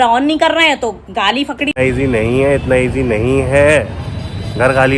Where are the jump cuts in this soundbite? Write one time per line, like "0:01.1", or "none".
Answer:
0:01.8